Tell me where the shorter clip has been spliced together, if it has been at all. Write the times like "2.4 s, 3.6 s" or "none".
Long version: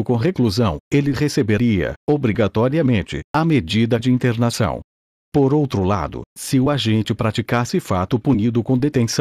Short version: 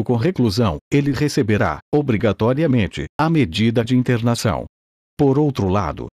1.6 s